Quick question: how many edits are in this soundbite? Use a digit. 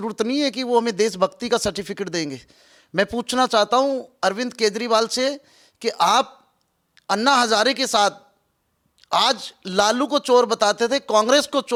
0